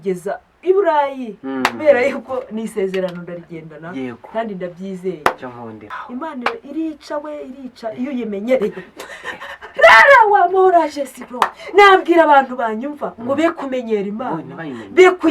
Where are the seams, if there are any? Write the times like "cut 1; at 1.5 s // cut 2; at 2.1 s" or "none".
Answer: cut 1; at 5.8 s